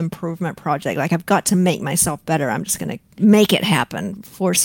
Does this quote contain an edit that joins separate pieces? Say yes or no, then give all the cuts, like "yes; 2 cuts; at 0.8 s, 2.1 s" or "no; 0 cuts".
yes; 1 cut; at 3.0 s